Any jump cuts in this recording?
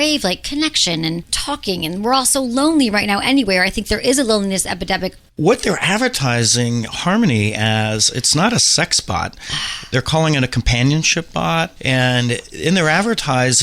yes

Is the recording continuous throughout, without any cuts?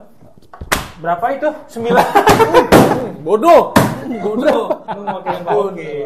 no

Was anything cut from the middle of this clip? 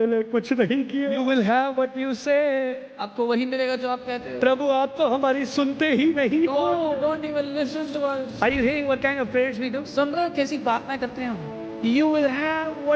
yes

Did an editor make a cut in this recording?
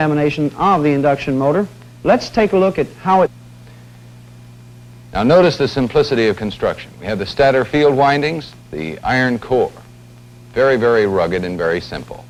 no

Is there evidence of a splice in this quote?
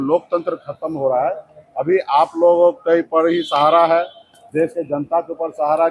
no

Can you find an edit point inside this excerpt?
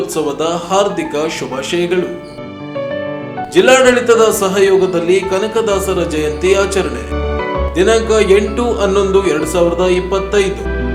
no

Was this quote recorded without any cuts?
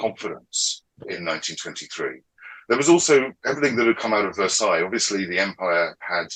no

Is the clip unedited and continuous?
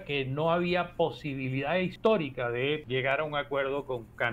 no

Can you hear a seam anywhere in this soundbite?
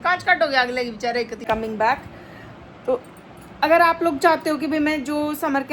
yes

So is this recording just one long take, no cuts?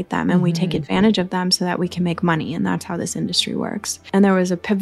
no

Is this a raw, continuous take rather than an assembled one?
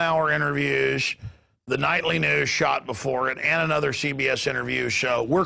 yes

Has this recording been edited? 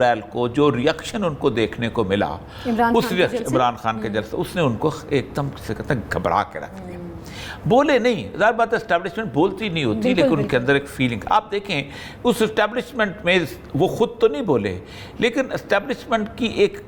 no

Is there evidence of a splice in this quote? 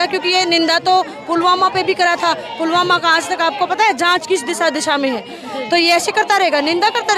no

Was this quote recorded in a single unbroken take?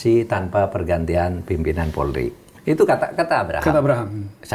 no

